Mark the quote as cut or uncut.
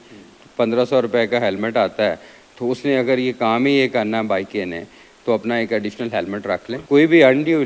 cut